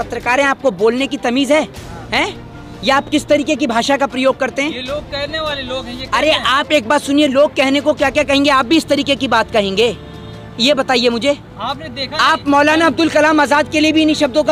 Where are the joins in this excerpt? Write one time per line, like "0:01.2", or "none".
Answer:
none